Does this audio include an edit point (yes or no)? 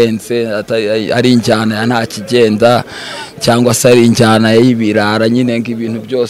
no